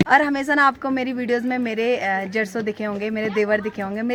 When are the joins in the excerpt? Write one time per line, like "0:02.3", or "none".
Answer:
none